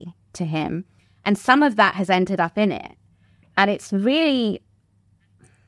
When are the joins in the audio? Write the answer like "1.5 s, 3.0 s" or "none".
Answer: none